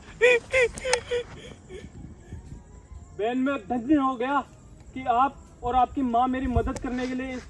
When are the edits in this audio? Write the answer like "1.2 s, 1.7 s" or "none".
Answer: none

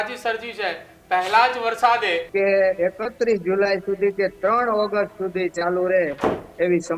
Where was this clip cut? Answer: 2.2 s

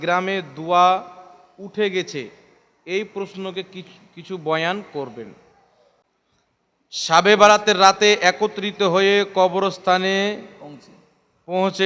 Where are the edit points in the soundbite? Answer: 6.0 s

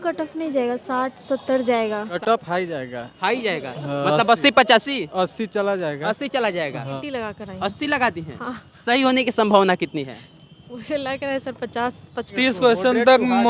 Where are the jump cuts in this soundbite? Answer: 2.1 s, 6.9 s, 12.3 s

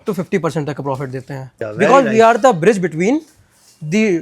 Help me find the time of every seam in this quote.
1.6 s

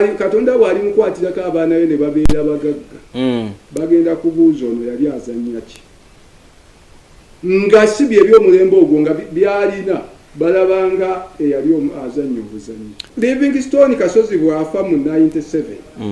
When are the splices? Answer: 13.1 s

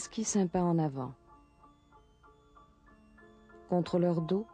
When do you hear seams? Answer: none

